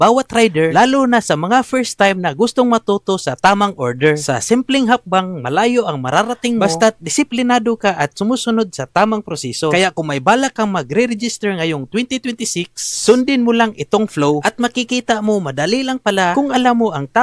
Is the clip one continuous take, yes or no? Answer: yes